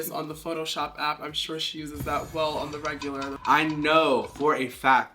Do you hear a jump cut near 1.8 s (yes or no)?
no